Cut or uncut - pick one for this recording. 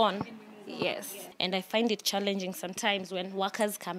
cut